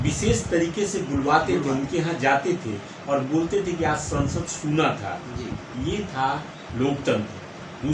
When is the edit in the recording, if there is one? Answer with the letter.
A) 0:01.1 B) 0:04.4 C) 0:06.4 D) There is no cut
D